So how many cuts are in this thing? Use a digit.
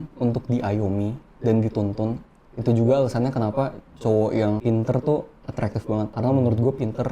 2